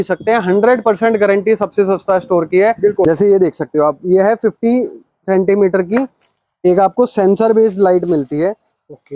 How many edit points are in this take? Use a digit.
1